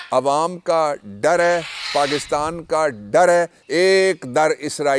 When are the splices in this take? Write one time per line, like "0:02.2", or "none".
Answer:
0:03.6